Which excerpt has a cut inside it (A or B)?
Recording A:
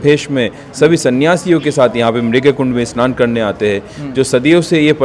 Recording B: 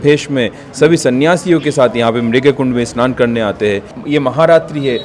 B